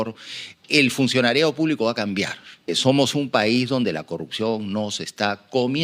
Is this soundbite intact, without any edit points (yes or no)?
no